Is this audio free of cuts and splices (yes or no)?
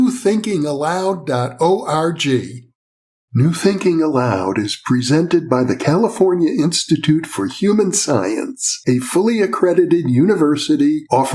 no